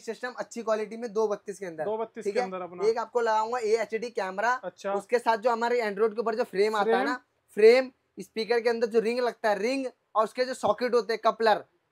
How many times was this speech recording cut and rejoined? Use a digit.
0